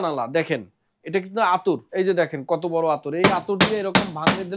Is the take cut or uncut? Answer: cut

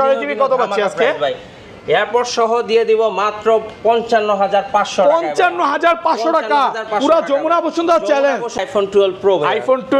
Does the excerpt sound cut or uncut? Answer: cut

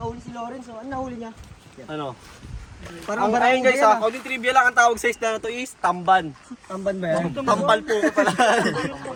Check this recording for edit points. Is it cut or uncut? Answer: uncut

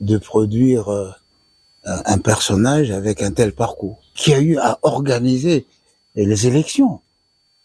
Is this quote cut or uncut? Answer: cut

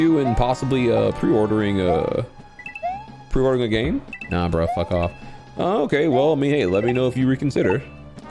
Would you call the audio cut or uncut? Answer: uncut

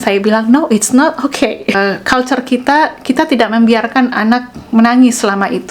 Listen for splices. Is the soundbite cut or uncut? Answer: cut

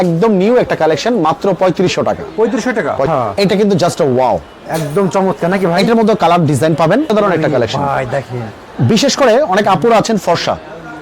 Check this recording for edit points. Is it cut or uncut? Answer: cut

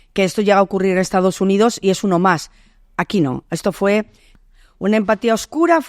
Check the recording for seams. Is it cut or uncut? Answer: cut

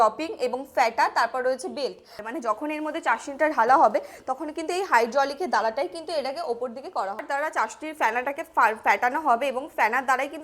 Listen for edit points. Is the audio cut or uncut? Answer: cut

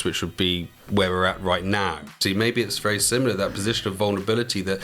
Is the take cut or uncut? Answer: cut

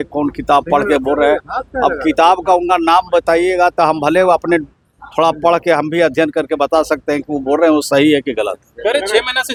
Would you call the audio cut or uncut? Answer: uncut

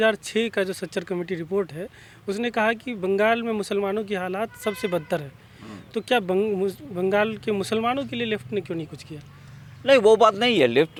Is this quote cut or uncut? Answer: uncut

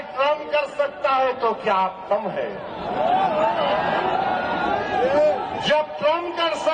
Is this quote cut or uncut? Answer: uncut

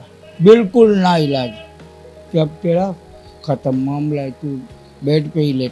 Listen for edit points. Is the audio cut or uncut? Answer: uncut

